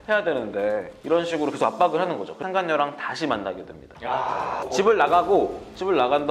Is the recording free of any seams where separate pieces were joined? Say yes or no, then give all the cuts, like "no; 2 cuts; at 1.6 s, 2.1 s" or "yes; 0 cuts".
no; 2 cuts; at 2.3 s, 4.6 s